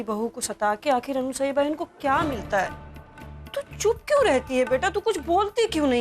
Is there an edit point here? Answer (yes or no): no